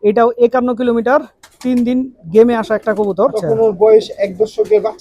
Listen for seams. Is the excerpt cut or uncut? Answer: cut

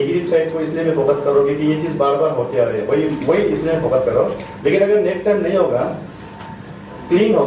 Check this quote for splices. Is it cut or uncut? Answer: uncut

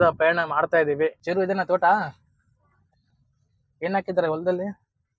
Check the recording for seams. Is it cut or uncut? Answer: uncut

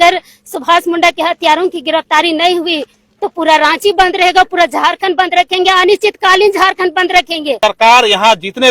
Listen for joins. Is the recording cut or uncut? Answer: cut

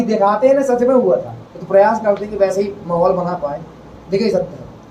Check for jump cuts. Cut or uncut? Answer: uncut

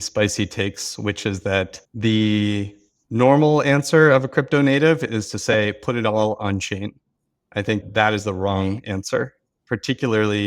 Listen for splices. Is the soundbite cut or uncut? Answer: cut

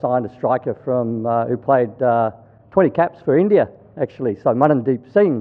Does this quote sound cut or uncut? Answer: uncut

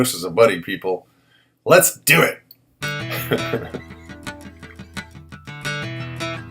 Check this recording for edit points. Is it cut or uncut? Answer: cut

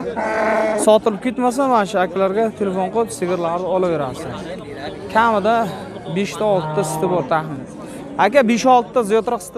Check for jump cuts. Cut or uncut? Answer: uncut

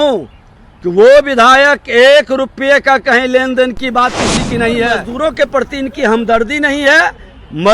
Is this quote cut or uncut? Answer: cut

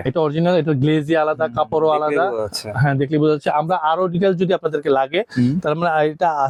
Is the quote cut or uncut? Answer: uncut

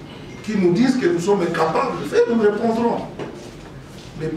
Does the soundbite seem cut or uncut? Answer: uncut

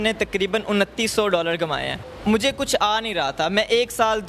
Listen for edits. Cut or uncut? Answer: cut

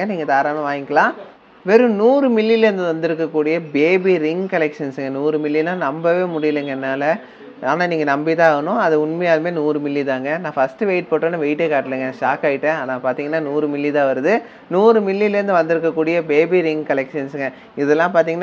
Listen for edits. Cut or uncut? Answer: cut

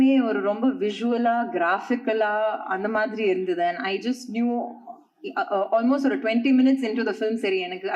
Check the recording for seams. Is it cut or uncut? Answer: uncut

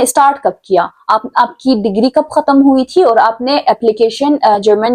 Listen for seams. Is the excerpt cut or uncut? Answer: uncut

